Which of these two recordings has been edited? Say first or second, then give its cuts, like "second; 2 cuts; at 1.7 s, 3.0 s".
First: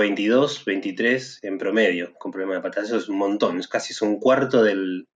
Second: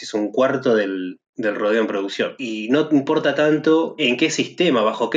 second; 2 cuts; at 2.4 s, 4.0 s